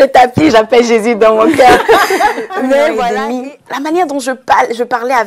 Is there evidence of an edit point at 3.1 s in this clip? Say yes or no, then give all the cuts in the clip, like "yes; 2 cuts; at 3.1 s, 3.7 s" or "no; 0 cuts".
yes; 1 cut; at 3.1 s